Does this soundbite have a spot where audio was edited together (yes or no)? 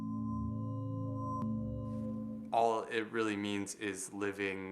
yes